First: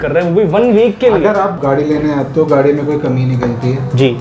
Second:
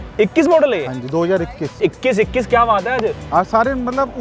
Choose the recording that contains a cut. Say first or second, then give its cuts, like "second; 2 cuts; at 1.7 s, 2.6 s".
second; 1 cut; at 1.8 s